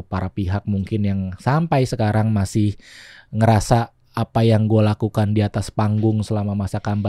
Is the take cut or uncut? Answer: uncut